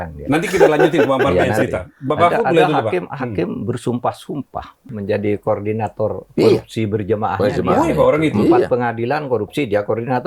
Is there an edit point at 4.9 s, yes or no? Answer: yes